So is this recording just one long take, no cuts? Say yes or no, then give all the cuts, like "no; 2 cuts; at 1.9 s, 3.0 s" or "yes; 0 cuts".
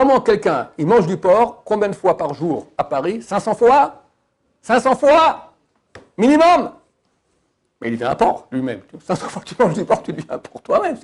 yes; 0 cuts